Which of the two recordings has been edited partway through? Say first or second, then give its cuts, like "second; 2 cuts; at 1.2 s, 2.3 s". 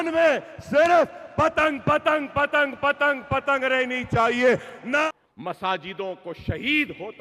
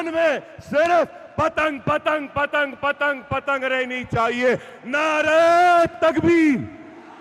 first; 1 cut; at 5.1 s